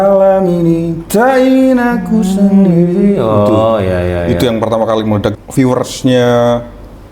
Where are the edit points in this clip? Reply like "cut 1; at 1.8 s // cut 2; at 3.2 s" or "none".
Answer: cut 1; at 5.4 s